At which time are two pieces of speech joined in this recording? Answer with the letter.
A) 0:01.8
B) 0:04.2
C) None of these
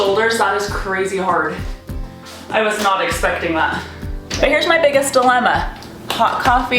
B